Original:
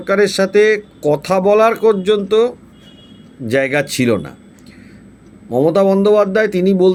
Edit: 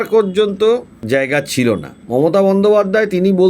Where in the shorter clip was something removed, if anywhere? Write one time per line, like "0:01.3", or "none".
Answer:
0:00.9
0:01.9

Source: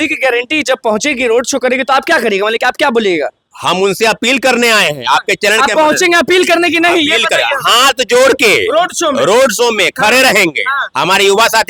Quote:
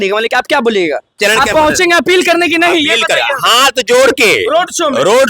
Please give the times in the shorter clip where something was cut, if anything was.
0:01.1

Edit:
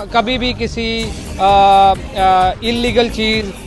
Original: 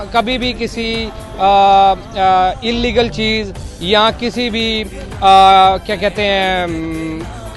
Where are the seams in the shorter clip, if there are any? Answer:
none

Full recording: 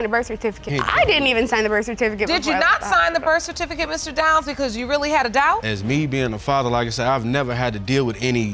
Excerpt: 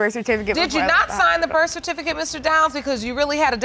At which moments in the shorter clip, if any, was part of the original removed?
none

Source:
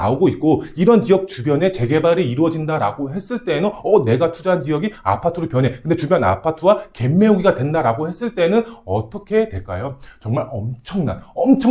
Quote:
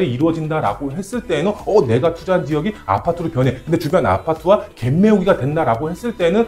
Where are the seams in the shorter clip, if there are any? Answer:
none

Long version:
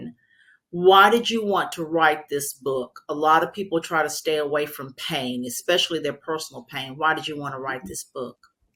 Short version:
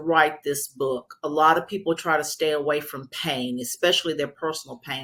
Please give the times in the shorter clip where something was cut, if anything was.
none

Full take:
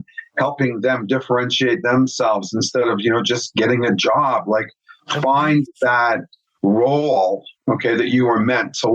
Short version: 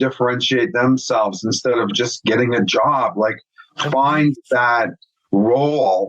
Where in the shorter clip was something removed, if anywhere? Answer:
0:01.9

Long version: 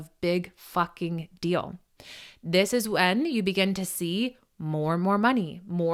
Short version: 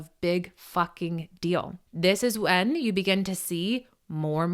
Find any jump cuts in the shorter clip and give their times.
0:01.8

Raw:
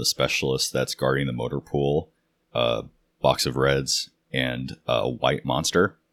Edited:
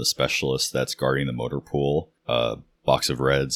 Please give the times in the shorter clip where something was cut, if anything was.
0:02.5

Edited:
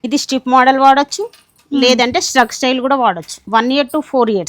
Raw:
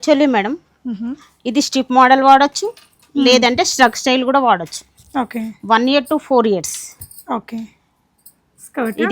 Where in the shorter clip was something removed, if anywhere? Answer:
0:03.3

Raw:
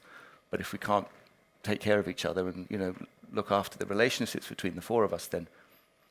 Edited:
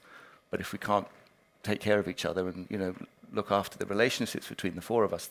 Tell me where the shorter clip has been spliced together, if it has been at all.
none

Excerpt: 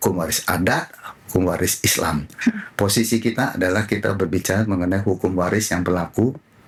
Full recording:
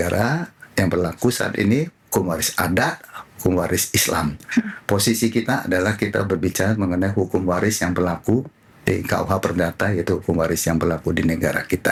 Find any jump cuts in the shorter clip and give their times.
none

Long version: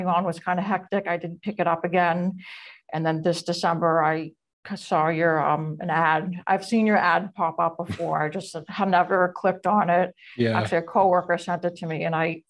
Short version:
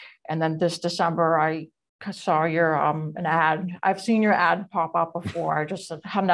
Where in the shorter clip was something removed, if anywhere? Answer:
none

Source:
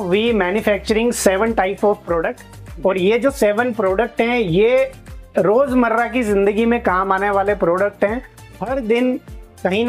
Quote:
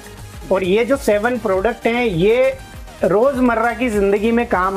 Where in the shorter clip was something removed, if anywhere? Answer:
none

